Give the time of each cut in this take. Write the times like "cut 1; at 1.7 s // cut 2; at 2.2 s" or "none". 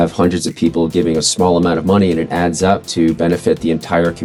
none

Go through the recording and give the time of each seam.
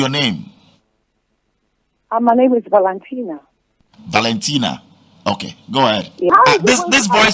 cut 1; at 6.3 s

